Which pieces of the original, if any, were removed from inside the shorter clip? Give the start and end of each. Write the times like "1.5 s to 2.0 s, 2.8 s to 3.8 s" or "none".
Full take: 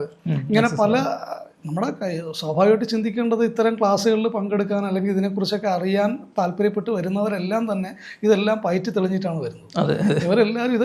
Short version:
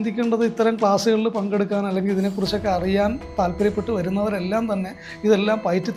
none